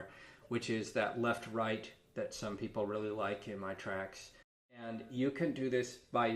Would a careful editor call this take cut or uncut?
cut